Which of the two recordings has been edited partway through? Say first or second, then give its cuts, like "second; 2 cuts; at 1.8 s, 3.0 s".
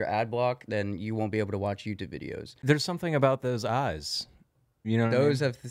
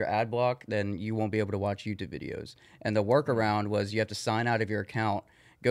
first; 1 cut; at 2.5 s